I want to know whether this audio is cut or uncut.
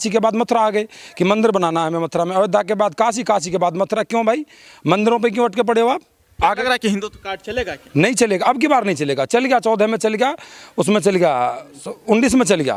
uncut